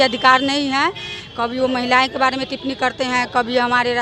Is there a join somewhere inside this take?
no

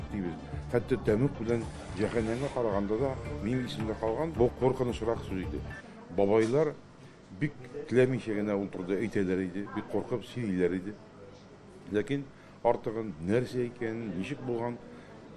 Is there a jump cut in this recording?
yes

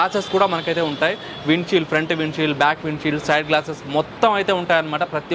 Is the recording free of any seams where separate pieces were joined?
yes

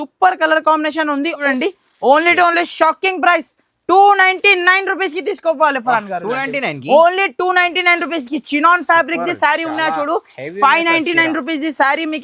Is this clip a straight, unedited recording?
no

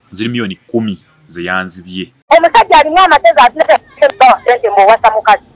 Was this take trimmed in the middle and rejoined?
yes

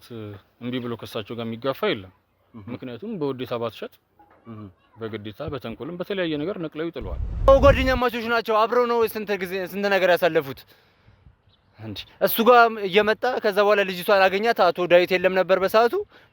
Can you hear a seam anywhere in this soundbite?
yes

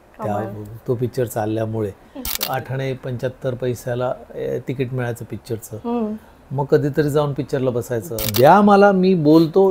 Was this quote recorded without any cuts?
no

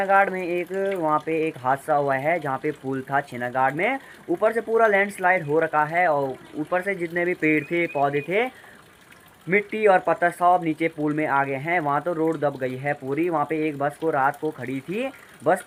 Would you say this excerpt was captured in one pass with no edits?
yes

